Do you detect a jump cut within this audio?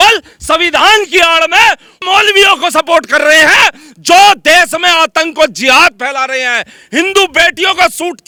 no; 0 cuts

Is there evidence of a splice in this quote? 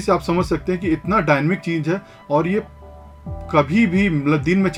no; 0 cuts

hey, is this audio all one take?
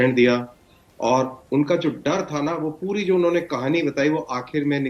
yes; 0 cuts

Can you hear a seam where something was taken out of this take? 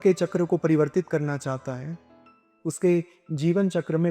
no; 0 cuts

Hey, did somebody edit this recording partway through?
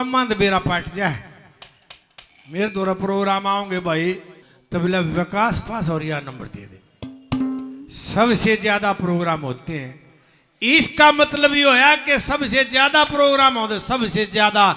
no; 0 cuts

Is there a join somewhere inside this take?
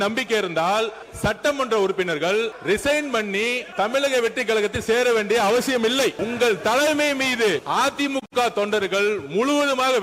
yes; 5 cuts; at 1.0 s, 2.6 s, 3.6 s, 6.2 s, 7.6 s

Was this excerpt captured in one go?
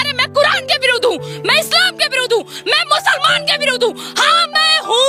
yes; 0 cuts

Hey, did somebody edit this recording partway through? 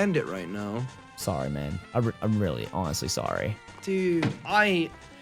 yes; 3 cuts; at 1.0 s, 1.8 s, 3.9 s

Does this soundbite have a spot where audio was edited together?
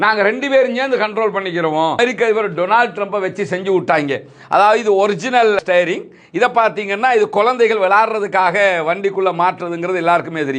yes; 1 cut; at 2.0 s

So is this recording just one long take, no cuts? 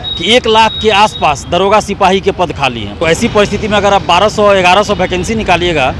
no; 1 cut; at 2.9 s

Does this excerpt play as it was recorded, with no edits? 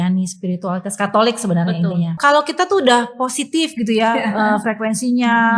no; 1 cut; at 2.1 s

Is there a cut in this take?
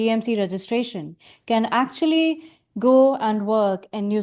no; 0 cuts

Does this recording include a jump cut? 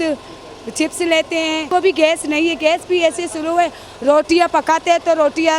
yes; 1 cut; at 1.6 s

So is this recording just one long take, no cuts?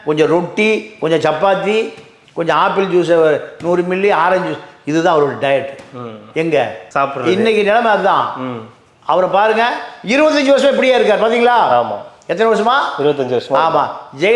yes; 0 cuts

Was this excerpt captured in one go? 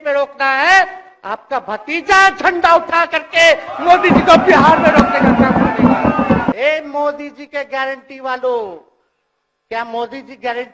no; 1 cut; at 6.5 s

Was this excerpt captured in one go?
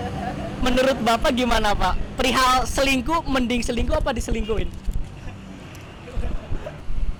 yes; 0 cuts

